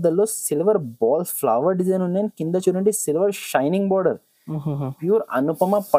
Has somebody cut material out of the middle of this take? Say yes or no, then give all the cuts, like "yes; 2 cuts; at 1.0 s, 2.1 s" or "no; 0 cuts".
no; 0 cuts